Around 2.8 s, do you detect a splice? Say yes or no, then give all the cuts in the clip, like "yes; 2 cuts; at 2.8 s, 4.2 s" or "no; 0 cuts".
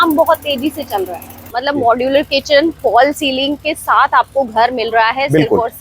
no; 1 cut; at 1.4 s